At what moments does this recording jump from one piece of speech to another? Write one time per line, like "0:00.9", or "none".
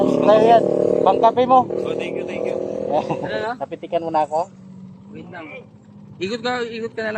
0:03.3